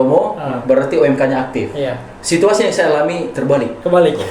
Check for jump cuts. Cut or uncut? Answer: cut